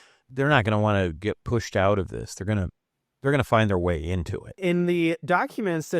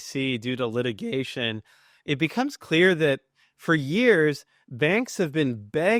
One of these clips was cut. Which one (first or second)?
first